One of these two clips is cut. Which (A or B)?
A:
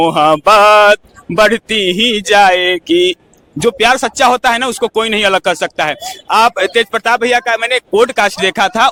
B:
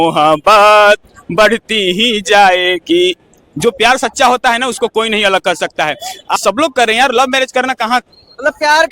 B